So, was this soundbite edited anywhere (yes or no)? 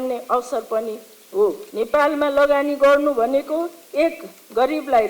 yes